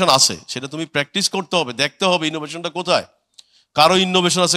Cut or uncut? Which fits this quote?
uncut